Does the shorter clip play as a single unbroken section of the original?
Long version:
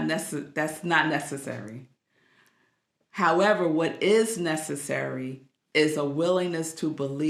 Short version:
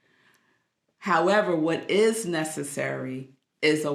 yes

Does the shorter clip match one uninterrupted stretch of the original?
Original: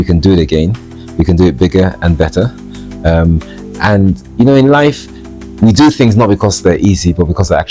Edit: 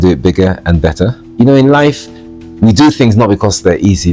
no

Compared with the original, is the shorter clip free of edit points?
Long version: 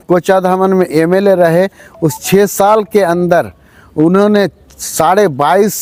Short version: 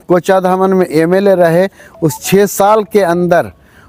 yes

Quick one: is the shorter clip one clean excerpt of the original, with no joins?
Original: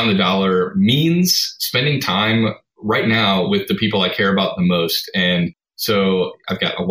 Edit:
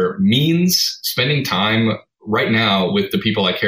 yes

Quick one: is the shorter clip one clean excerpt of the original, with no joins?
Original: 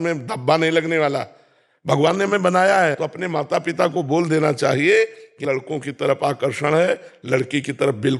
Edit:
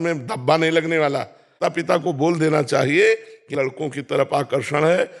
no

